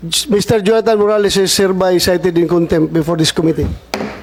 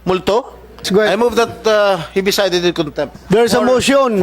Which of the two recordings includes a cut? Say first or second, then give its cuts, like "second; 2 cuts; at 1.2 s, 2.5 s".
second; 2 cuts; at 0.9 s, 3.2 s